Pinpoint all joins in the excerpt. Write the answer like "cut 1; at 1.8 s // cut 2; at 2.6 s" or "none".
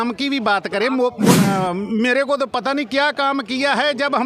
cut 1; at 1.4 s